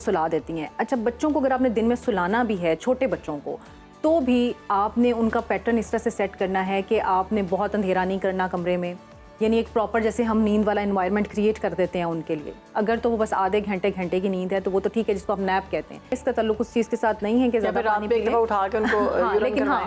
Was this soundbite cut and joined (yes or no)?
yes